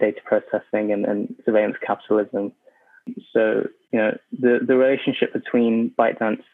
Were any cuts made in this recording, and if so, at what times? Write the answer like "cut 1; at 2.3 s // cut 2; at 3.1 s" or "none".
cut 1; at 3.1 s